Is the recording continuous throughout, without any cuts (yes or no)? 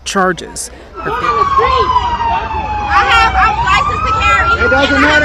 no